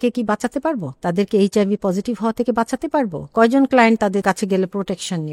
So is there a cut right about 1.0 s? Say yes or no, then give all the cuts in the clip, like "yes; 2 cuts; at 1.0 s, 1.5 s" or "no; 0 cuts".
no; 1 cut; at 4.2 s